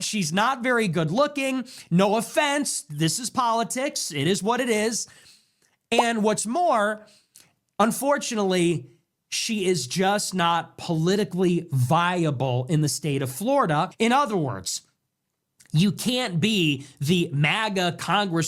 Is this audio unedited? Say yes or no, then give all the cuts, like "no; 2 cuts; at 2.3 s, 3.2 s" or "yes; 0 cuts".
yes; 0 cuts